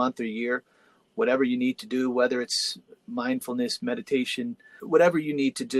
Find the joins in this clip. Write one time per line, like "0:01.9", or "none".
0:04.7